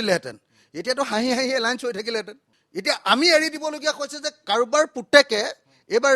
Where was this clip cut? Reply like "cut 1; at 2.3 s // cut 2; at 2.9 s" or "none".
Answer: none